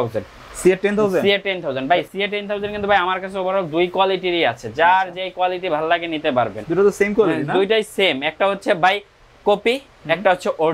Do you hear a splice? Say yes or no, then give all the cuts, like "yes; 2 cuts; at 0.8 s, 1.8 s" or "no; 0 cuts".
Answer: yes; 1 cut; at 2.1 s